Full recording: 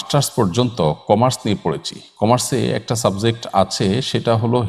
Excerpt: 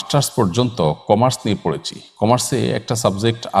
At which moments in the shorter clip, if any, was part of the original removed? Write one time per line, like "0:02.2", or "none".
none